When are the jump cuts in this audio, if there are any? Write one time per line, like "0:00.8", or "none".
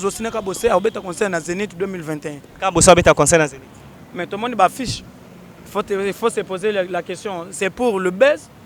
none